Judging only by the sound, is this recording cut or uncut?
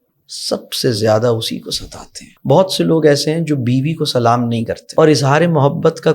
cut